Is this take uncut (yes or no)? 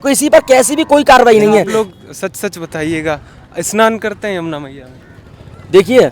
no